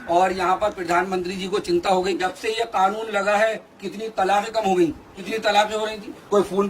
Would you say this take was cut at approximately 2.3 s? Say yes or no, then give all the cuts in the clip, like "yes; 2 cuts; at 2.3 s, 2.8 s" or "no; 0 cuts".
yes; 2 cuts; at 2.3 s, 5.1 s